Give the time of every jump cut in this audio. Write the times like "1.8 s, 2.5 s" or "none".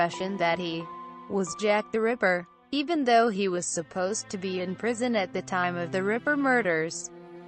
4.9 s

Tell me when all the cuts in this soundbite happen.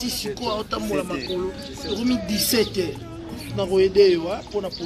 1.8 s, 3.4 s

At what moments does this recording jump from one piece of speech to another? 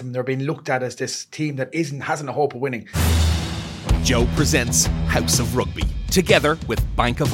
2.9 s

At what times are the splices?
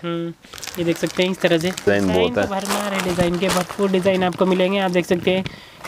1.9 s

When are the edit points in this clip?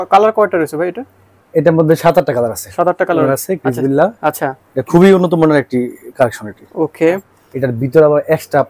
3.3 s, 7.4 s

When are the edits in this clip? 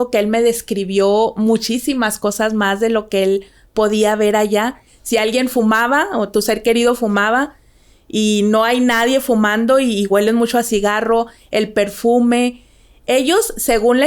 4.9 s

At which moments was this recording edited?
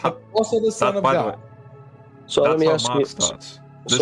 none

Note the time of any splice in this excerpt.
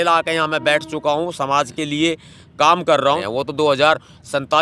3.2 s

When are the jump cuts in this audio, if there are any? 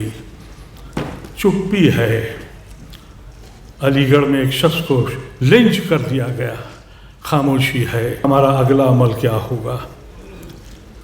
8.2 s

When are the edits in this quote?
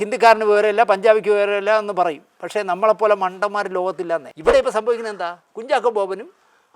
4.3 s

